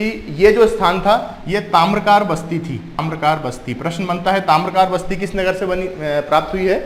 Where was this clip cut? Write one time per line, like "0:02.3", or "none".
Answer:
0:03.0